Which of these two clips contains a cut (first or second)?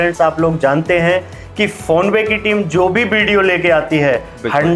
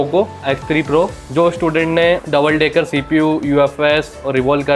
second